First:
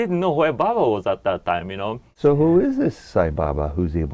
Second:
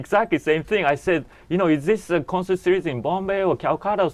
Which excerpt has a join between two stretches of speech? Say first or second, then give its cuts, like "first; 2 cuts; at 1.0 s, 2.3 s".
first; 1 cut; at 2.1 s